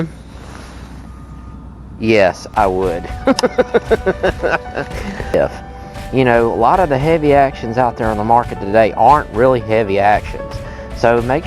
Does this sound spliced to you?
yes; 1 cut; at 5.3 s

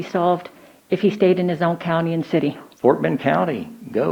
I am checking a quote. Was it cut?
yes; 1 cut; at 2.7 s

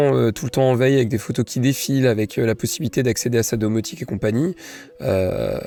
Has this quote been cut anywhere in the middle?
no; 0 cuts

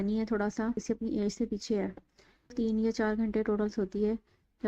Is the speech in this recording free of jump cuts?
no; 2 cuts; at 0.8 s, 2.5 s

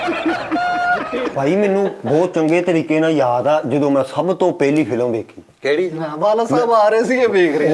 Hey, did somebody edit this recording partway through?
yes; 1 cut; at 1.3 s

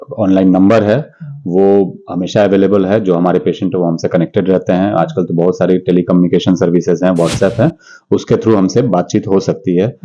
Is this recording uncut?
yes; 0 cuts

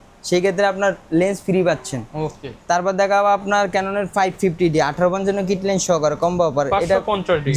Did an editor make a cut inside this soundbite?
no; 0 cuts

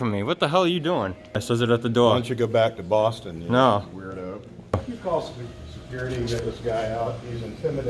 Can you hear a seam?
yes; 2 cuts; at 1.4 s, 4.7 s

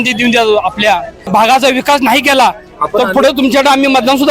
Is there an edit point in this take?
yes; 1 cut; at 1.3 s

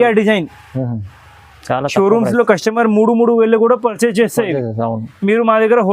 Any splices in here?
no; 0 cuts

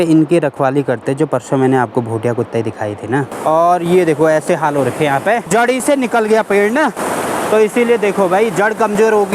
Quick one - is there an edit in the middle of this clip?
yes; 2 cuts; at 3.3 s, 5.5 s

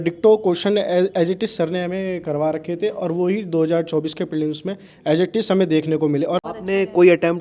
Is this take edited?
yes; 1 cut; at 6.4 s

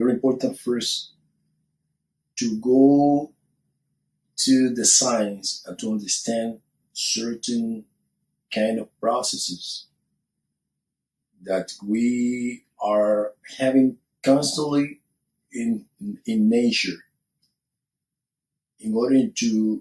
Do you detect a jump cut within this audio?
yes; 1 cut; at 16.4 s

